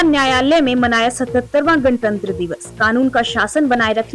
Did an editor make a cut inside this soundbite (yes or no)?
no